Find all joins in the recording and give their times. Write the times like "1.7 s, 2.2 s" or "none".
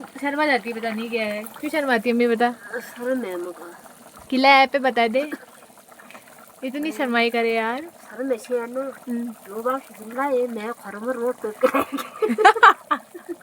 none